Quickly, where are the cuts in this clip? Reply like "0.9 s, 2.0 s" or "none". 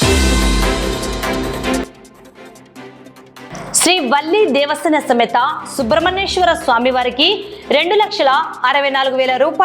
1.8 s